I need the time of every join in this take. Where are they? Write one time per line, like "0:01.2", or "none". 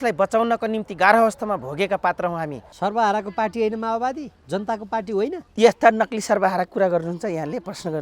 0:02.6